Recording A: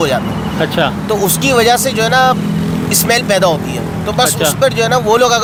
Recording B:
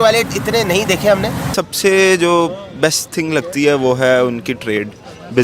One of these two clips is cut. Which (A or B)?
B